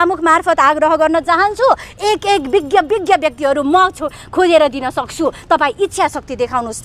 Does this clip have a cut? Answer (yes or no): no